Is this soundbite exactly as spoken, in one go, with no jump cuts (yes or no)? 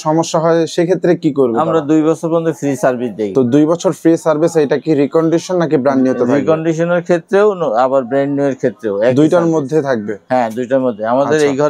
yes